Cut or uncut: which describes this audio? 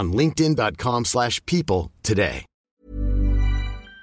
cut